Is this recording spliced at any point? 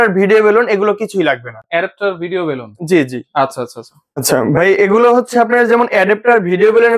no; 0 cuts

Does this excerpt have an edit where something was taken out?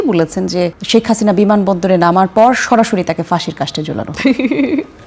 no; 0 cuts

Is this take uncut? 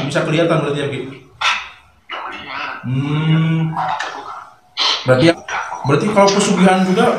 no; 1 cut; at 5.3 s

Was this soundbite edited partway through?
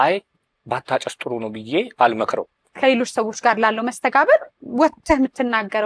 yes; 1 cut; at 2.7 s

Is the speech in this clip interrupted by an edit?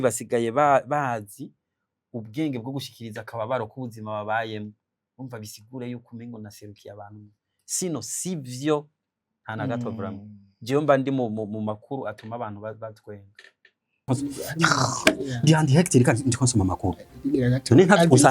yes; 1 cut; at 14.1 s

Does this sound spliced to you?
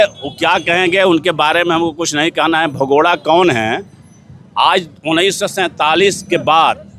no; 0 cuts

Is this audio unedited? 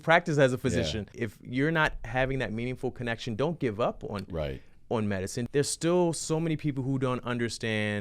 no; 2 cuts; at 1.2 s, 5.4 s

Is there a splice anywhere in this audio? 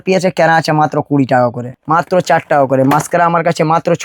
yes; 1 cut; at 1.7 s

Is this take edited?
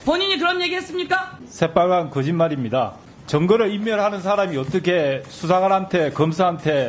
yes; 2 cuts; at 1.4 s, 3.1 s

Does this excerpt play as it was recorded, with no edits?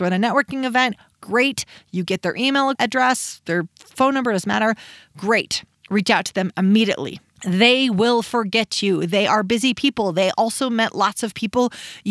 no; 1 cut; at 2.8 s

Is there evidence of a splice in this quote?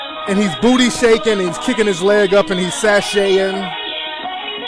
yes; 1 cut; at 1.6 s

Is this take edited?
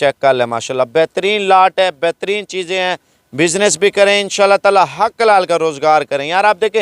no; 0 cuts

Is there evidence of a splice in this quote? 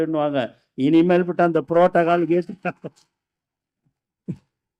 no; 0 cuts

